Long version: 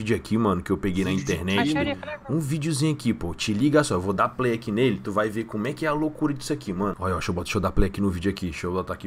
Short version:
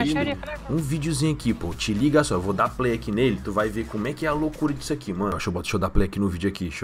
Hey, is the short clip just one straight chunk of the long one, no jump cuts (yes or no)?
no